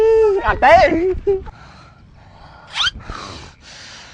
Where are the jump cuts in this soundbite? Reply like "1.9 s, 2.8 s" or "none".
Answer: 1.6 s